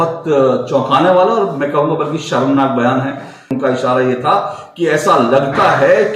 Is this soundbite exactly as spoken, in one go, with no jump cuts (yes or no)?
no